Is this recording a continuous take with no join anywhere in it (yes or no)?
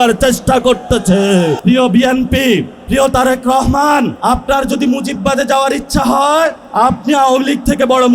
no